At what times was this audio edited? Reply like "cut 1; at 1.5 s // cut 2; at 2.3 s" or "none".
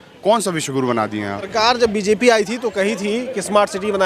cut 1; at 1.5 s